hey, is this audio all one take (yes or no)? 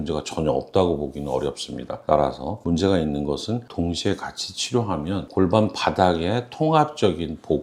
yes